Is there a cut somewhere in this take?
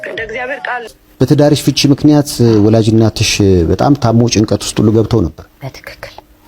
yes; 1 cut; at 1.0 s

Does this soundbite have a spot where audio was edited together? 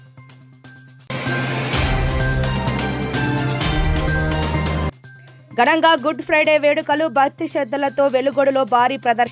yes; 1 cut; at 1.0 s

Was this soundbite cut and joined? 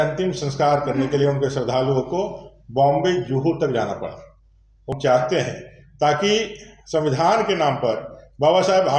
yes; 1 cut; at 4.9 s

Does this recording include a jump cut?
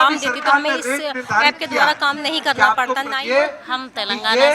yes; 1 cut; at 3.1 s

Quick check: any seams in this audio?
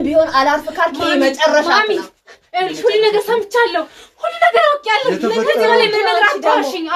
no; 0 cuts

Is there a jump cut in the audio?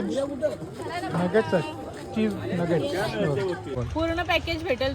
yes; 1 cut; at 3.7 s

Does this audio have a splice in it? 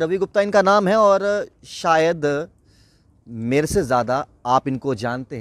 no; 0 cuts

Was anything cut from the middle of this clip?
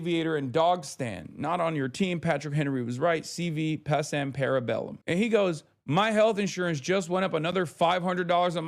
yes; 1 cut; at 5.0 s

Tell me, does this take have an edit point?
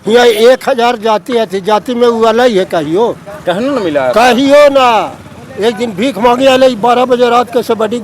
no; 0 cuts

